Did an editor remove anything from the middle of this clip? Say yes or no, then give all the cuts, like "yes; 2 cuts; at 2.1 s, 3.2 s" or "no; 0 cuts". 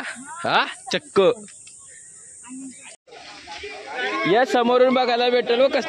yes; 1 cut; at 2.9 s